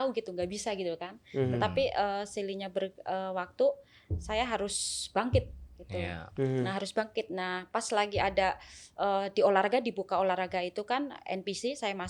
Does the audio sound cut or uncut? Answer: uncut